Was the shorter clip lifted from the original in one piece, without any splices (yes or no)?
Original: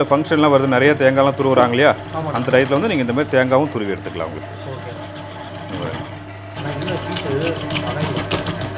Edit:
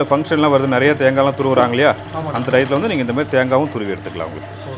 yes